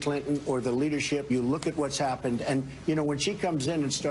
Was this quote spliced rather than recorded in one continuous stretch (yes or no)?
yes